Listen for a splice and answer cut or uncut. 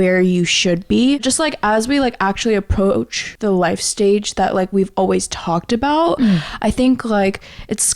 cut